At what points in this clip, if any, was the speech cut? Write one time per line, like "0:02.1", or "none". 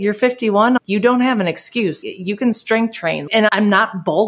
0:00.8
0:02.0
0:03.4